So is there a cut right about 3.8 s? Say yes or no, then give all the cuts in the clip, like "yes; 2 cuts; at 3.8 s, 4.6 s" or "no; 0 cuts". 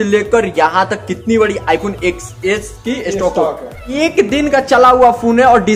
yes; 1 cut; at 3.8 s